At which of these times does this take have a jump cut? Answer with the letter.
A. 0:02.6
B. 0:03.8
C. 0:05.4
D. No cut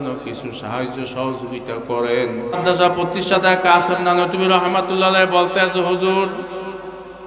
A